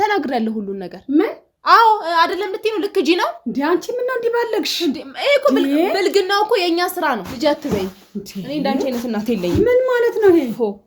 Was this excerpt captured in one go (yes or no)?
no